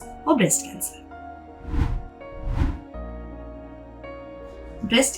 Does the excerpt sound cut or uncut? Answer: uncut